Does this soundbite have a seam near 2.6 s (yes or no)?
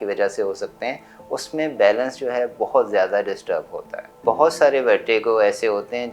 no